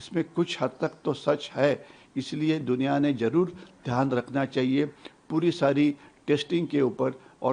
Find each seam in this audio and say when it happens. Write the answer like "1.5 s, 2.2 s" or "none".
none